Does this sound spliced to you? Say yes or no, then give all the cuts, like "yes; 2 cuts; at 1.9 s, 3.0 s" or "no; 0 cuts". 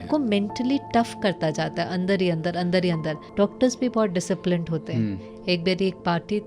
yes; 1 cut; at 3.2 s